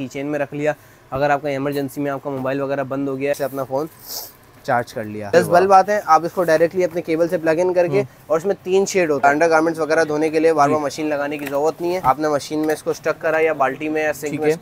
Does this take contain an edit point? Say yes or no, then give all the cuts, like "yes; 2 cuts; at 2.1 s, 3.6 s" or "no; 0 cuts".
yes; 4 cuts; at 3.3 s, 5.3 s, 9.2 s, 12.0 s